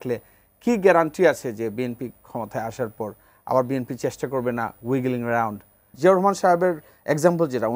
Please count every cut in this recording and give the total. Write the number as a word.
one